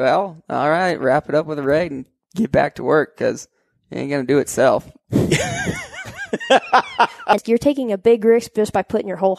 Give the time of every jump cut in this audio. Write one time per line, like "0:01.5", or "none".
0:07.4